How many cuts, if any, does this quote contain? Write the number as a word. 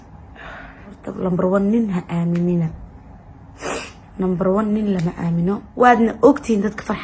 two